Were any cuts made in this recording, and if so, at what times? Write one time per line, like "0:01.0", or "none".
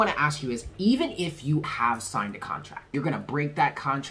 0:01.6
0:02.8